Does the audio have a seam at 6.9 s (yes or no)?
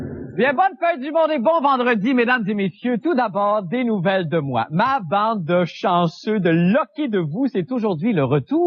no